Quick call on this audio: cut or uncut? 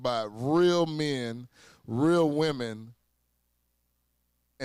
uncut